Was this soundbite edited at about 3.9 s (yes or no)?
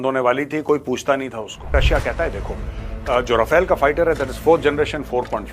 no